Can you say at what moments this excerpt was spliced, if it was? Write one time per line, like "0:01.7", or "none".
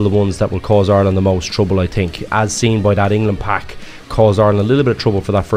0:02.2
0:04.0